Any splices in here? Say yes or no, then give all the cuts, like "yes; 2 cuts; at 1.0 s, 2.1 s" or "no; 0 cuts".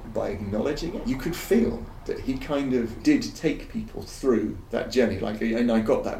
yes; 3 cuts; at 1.0 s, 3.0 s, 4.6 s